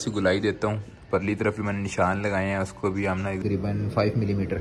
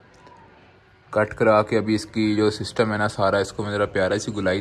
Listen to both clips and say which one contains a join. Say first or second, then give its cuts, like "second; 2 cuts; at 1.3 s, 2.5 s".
first; 1 cut; at 3.4 s